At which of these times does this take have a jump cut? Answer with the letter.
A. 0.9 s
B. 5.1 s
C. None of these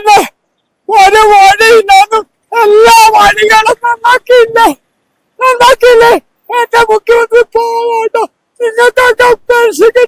C